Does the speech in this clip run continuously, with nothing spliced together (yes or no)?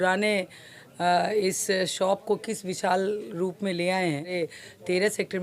no